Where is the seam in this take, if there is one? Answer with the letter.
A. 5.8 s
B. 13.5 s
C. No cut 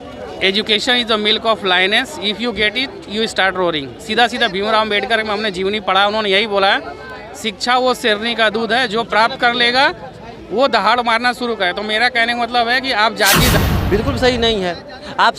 B